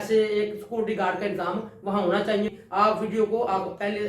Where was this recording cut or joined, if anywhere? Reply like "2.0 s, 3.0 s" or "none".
2.6 s